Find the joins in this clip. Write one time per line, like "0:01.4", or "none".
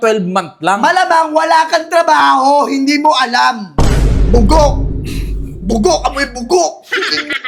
none